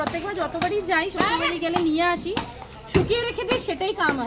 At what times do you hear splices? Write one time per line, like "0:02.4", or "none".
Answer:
none